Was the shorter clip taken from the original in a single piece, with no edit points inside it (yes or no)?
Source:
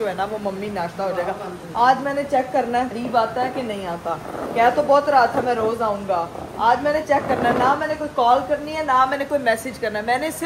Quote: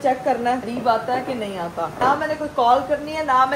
no